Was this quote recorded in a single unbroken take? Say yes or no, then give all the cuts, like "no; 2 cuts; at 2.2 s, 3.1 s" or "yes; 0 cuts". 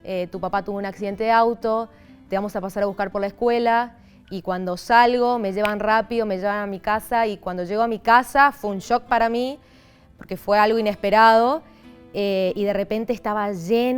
yes; 0 cuts